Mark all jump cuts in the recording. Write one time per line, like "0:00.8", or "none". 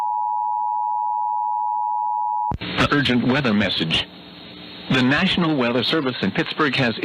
0:02.5